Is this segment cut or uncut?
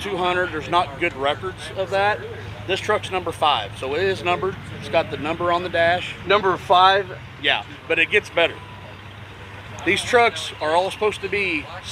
uncut